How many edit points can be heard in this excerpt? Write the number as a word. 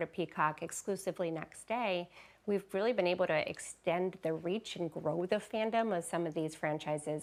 zero